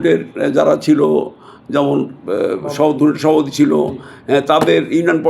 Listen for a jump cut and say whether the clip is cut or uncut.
uncut